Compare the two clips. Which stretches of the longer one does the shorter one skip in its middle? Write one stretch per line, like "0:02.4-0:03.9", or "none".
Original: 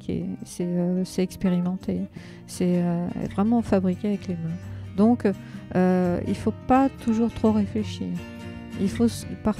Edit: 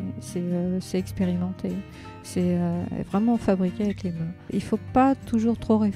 0:04.7-0:06.2